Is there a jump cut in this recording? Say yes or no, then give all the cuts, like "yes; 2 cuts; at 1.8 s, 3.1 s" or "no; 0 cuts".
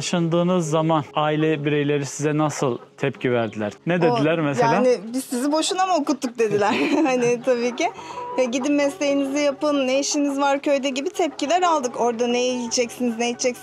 yes; 2 cuts; at 1.1 s, 3.7 s